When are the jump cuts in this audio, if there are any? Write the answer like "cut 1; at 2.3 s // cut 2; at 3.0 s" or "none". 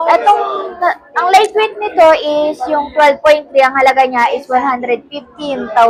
none